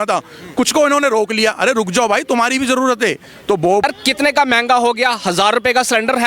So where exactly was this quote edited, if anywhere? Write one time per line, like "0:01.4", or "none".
0:03.8

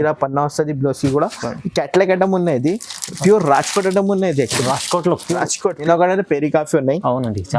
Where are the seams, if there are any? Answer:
0:05.8

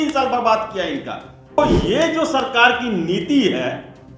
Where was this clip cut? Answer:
0:01.6

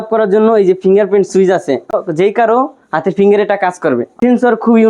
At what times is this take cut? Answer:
0:01.9
0:04.2

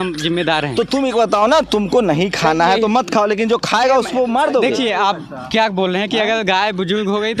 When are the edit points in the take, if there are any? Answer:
none

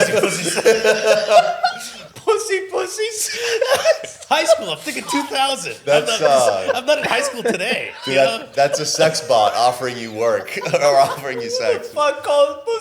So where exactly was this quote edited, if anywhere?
0:02.0

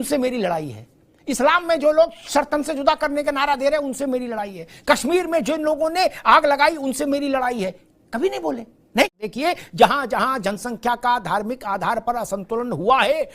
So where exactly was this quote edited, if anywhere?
0:09.2

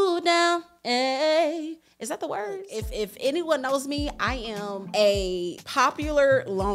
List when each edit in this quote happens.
0:02.7
0:04.8
0:05.6

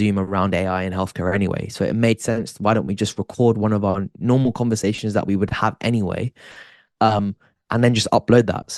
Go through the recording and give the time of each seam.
none

